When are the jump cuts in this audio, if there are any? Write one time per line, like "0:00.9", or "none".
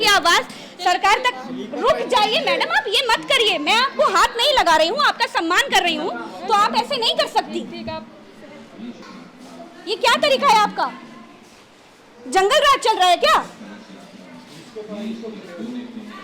0:09.0